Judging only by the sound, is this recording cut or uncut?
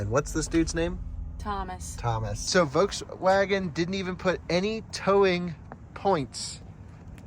cut